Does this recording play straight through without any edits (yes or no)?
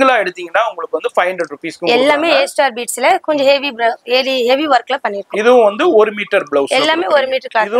yes